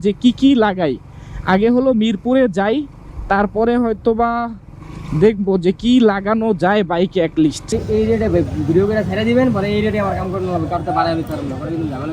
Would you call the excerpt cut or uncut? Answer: cut